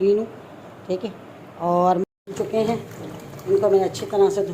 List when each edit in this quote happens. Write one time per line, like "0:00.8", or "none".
0:02.0

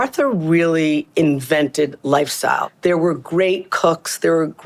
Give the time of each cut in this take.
0:02.7

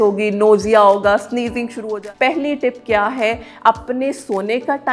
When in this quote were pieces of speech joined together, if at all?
0:01.8

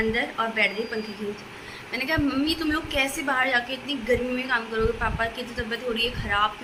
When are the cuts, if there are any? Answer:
none

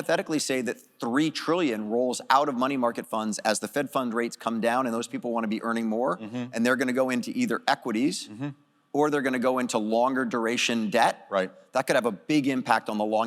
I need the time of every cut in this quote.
none

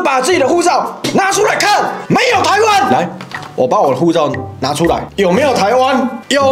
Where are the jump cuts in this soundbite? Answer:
0:02.9
0:05.1

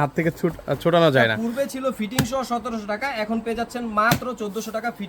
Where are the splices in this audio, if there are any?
0:01.4

